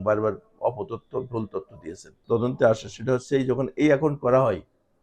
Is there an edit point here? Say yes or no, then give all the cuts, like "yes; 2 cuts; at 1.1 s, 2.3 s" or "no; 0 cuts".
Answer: yes; 1 cut; at 2.1 s